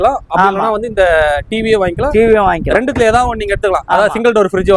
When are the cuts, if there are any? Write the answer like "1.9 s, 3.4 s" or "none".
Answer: none